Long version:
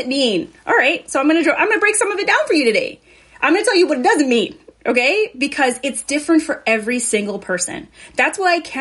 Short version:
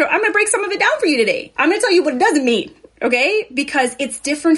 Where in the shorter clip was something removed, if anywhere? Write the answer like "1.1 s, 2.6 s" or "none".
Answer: 1.5 s